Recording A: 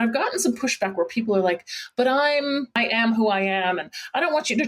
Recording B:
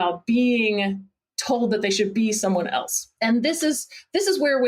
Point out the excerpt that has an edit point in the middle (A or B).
A